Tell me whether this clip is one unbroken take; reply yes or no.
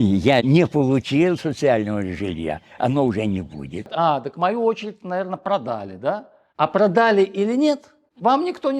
no